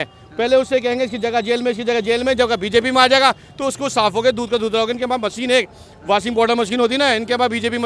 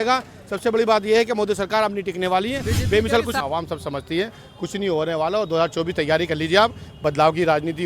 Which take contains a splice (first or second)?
second